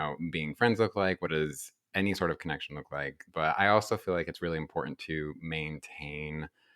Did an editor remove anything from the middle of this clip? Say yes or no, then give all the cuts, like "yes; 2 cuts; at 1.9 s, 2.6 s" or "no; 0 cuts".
yes; 1 cut; at 3.2 s